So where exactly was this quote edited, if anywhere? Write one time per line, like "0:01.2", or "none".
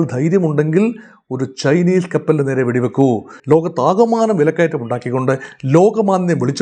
0:03.3